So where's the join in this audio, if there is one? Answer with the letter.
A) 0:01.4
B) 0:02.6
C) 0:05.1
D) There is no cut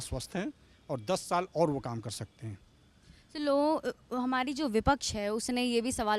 D